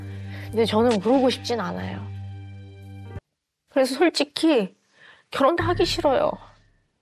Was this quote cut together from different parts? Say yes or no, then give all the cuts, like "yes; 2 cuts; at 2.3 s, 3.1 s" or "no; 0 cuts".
yes; 1 cut; at 3.2 s